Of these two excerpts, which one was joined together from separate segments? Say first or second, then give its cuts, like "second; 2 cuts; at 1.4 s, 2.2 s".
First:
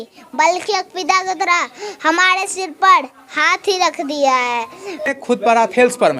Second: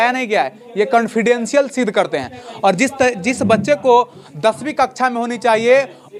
first; 1 cut; at 4.9 s